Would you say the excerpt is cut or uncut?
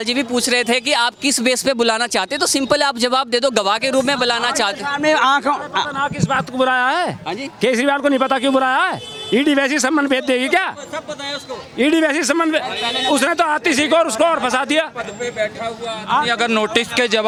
uncut